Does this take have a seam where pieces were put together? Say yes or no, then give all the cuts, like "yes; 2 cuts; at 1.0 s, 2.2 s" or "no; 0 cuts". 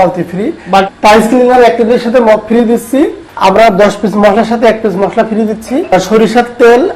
yes; 3 cuts; at 0.9 s, 3.2 s, 5.9 s